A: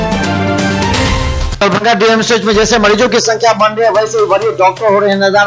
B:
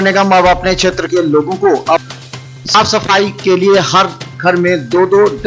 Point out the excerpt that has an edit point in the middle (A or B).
A